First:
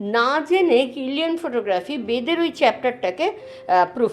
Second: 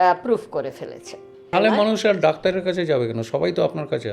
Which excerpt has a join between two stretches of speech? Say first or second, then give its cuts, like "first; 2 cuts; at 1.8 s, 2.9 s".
second; 1 cut; at 1.5 s